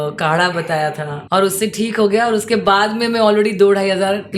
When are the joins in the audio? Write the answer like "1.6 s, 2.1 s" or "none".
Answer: 1.1 s